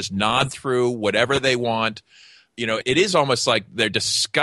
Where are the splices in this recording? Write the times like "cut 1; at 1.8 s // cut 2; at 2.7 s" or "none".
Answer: cut 1; at 2.8 s